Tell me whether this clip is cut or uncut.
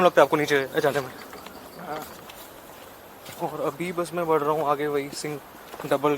cut